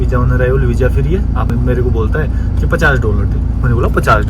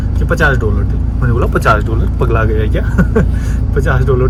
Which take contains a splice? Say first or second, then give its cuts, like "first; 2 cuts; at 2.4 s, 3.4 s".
first; 1 cut; at 1.5 s